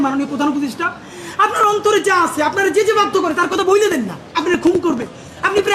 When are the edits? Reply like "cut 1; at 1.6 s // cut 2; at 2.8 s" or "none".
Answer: cut 1; at 4.2 s